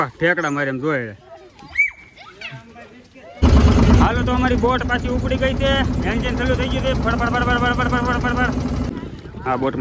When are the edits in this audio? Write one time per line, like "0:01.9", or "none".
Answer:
0:03.3
0:08.9